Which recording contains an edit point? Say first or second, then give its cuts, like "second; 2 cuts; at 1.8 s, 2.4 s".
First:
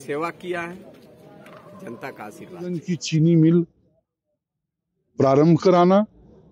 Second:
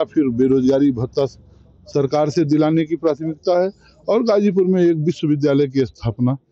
first; 1 cut; at 2.8 s